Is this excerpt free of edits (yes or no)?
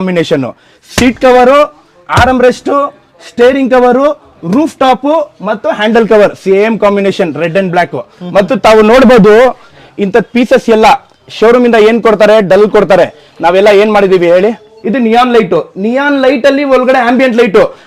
no